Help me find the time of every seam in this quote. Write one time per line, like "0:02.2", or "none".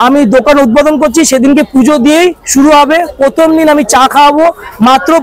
none